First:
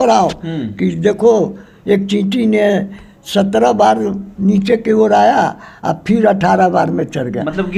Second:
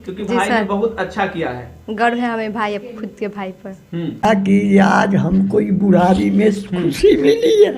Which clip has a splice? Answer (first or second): second